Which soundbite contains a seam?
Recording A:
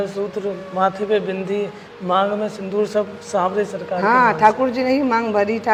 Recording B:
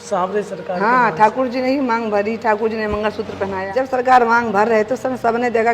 B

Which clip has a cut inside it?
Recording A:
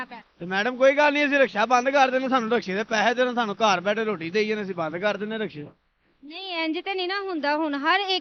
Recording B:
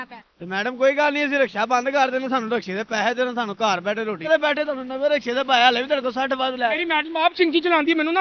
B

